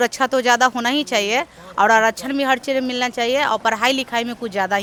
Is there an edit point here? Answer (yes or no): no